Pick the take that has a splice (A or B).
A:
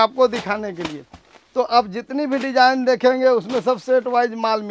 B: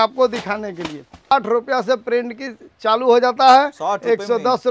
B